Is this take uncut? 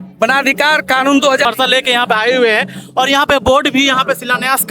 no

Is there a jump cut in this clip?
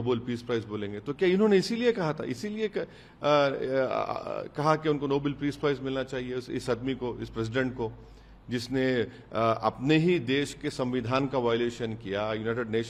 no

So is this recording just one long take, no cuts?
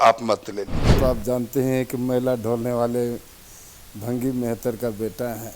no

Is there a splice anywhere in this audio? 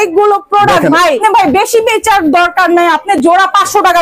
yes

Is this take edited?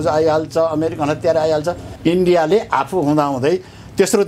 yes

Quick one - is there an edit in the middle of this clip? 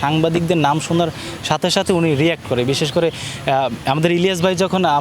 no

